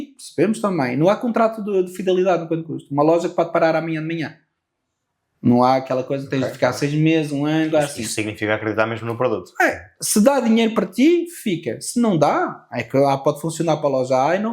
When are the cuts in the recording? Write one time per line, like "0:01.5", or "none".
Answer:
none